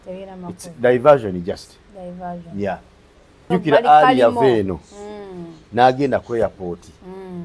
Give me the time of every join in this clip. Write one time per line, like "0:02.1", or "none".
0:03.4